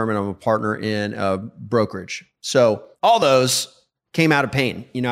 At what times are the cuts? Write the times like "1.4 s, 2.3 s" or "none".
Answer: 2.9 s